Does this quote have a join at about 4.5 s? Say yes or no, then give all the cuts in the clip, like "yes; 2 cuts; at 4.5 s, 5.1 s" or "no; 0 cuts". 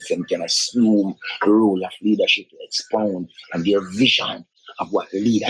no; 0 cuts